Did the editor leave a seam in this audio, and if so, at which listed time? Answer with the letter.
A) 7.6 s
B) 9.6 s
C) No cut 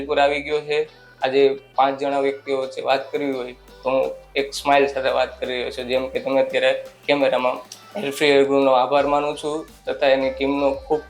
A